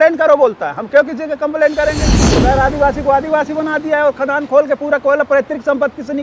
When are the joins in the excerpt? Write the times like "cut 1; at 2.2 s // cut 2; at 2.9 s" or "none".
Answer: cut 1; at 2.2 s